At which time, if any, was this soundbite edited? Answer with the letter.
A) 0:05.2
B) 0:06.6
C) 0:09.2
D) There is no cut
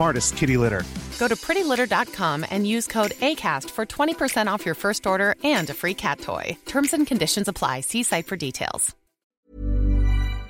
C